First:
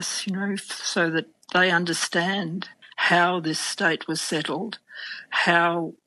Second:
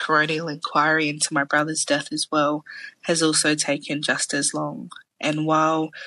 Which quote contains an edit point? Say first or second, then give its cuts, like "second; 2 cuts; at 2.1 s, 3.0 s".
first; 1 cut; at 2.8 s